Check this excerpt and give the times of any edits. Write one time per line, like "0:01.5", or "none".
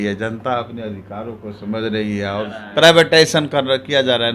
0:02.6